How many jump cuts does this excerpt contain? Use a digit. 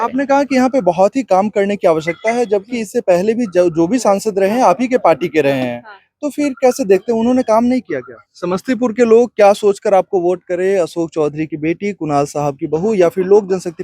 1